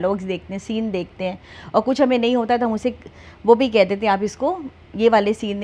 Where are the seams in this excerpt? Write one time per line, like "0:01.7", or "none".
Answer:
none